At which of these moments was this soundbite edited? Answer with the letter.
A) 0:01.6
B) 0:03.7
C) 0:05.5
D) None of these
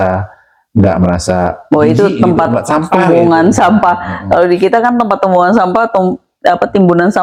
D